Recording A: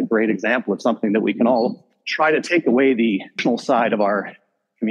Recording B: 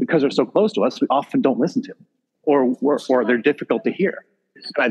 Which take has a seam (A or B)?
A